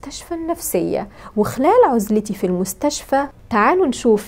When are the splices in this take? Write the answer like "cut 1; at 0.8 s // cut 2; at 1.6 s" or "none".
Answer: cut 1; at 3.3 s